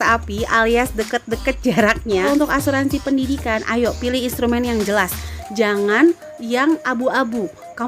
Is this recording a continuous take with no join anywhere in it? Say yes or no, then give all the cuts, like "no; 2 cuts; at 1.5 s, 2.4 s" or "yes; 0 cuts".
no; 1 cut; at 2.3 s